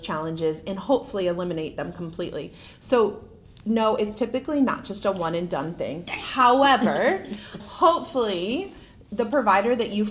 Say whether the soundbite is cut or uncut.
uncut